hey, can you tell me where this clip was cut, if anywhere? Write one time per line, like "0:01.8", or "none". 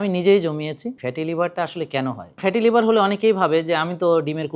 0:00.9
0:02.4